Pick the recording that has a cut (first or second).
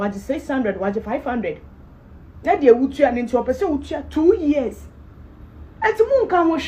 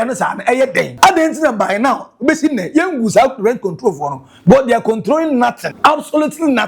second